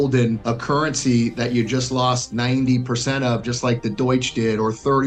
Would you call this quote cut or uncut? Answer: uncut